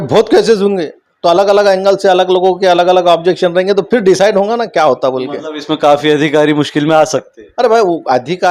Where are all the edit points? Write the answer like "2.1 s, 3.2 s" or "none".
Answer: none